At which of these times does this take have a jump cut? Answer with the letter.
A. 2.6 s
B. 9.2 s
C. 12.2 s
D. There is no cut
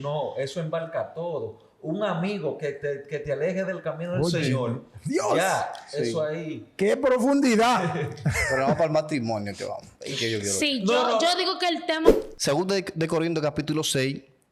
C